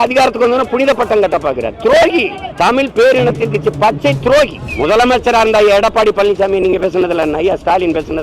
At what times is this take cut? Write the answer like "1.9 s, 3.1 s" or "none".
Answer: 2.4 s, 4.6 s